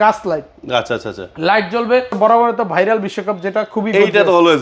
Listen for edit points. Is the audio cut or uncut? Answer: cut